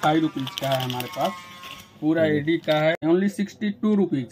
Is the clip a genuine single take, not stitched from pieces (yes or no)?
no